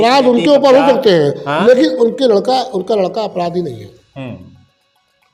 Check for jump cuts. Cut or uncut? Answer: uncut